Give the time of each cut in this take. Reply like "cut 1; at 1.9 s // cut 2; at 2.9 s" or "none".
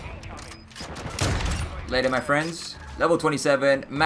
none

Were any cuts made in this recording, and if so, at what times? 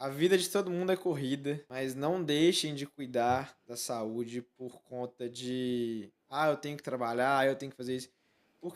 cut 1; at 1.7 s

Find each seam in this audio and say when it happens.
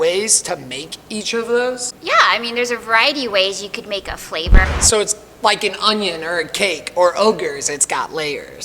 cut 1; at 1.9 s // cut 2; at 4.6 s

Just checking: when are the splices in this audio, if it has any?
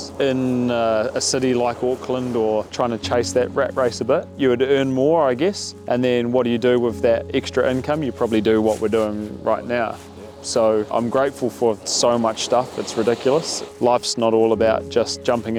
none

